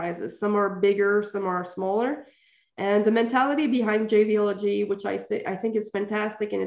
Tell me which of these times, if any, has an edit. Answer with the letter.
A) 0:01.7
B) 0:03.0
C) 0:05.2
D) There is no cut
D